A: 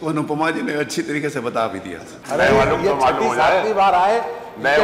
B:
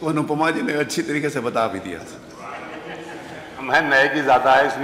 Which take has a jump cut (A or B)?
A